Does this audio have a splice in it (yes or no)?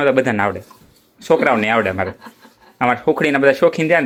no